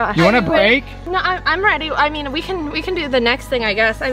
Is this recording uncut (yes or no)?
yes